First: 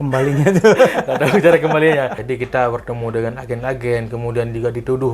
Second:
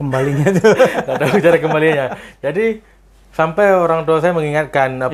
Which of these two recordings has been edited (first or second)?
first